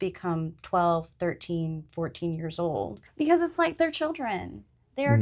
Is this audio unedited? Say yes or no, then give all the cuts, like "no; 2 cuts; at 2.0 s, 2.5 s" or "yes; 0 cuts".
no; 1 cut; at 3.0 s